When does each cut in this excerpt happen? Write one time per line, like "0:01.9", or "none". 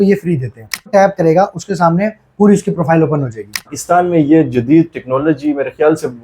0:00.9
0:03.7